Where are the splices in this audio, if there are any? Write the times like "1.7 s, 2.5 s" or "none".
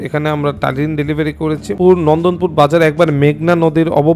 1.7 s